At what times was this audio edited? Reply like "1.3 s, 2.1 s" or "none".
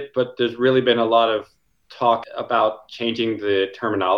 2.2 s